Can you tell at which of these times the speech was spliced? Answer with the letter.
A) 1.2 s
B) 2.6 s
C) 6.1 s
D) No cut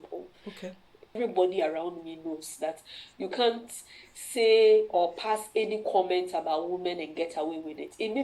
A